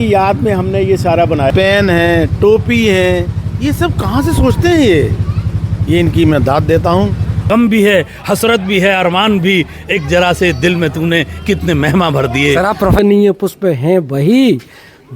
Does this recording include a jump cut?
yes; 3 cuts; at 1.5 s, 7.4 s, 13.0 s

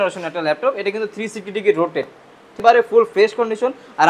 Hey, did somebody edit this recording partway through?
yes; 1 cut; at 2.6 s

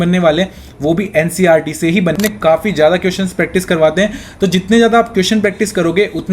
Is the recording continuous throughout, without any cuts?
no; 1 cut; at 2.2 s

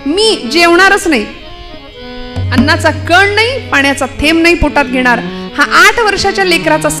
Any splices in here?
no; 0 cuts

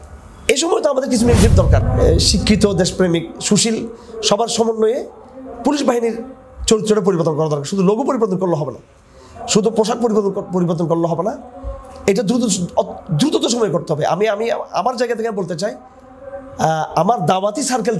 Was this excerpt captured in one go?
no; 1 cut; at 1.9 s

